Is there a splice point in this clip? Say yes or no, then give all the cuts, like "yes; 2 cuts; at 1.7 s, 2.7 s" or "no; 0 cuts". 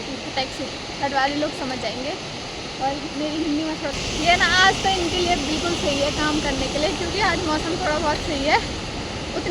yes; 1 cut; at 3.9 s